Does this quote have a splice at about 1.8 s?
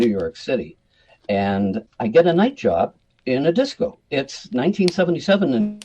yes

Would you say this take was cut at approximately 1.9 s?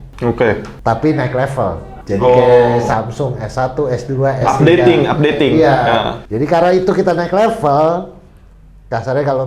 no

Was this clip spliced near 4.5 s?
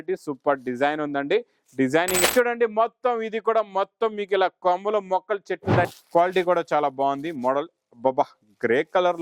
no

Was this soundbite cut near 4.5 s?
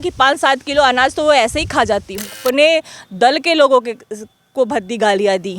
no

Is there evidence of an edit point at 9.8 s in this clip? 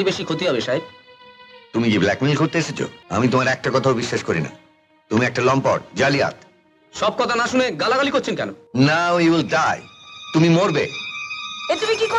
no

